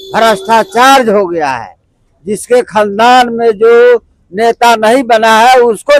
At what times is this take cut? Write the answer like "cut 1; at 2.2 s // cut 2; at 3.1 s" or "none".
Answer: none